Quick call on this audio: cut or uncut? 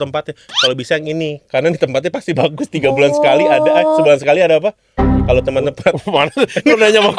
uncut